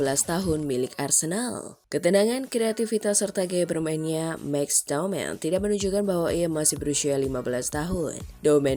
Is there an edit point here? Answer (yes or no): no